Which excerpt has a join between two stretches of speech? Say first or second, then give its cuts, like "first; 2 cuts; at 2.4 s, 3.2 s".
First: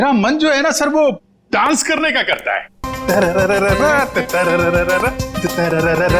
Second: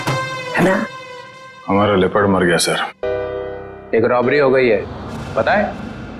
second; 1 cut; at 2.9 s